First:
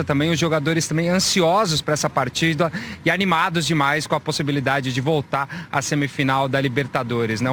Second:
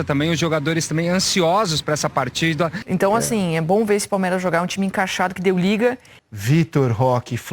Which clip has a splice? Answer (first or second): second